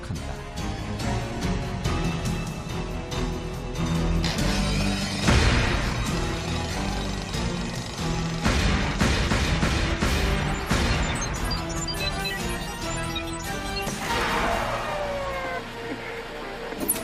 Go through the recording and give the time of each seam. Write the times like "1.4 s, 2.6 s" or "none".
none